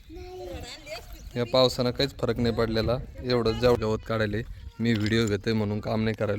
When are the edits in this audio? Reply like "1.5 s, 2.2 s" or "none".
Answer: 3.8 s